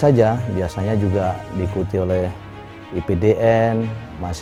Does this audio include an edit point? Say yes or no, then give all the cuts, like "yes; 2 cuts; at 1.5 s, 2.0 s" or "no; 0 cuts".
no; 0 cuts